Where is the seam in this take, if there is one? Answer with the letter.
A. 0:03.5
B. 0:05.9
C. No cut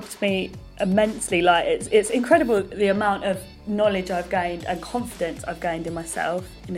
A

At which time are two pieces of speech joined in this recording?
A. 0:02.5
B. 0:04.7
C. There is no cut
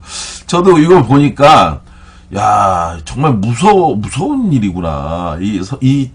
A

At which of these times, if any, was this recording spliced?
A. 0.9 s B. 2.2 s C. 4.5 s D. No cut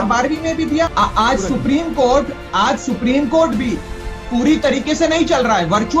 A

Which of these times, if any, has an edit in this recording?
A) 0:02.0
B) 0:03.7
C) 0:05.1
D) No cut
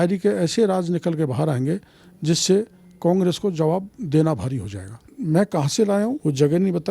C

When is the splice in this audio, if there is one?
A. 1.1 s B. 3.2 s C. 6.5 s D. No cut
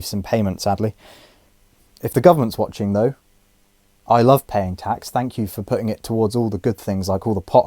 D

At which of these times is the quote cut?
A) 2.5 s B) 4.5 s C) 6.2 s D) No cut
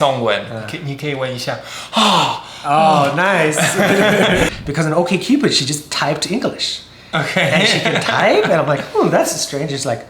B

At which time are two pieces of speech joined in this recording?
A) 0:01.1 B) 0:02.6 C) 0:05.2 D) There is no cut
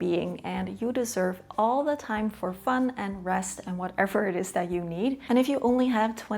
C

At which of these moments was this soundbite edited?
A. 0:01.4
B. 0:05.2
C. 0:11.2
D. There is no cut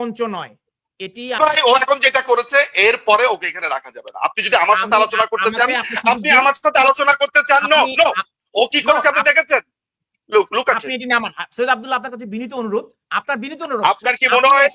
A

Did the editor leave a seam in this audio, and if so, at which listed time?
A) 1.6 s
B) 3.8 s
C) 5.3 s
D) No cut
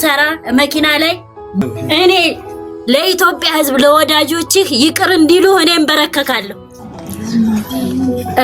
A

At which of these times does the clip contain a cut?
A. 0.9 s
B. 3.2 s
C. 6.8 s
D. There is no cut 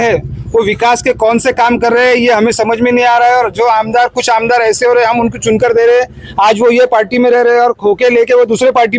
D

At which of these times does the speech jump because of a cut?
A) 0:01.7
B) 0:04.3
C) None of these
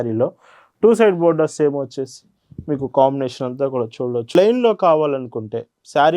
B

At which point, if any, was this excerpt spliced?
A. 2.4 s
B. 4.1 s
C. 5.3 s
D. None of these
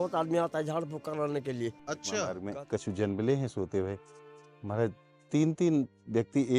A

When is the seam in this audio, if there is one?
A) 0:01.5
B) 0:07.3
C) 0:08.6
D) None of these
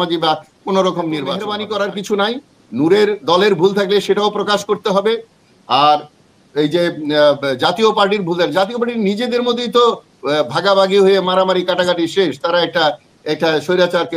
A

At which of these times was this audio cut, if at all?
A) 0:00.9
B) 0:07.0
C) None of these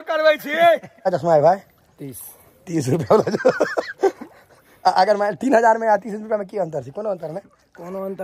A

